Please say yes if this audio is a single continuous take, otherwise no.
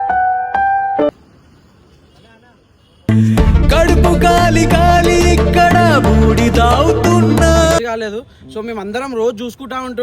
no